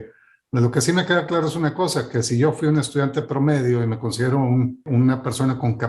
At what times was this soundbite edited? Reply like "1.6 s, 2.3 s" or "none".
4.8 s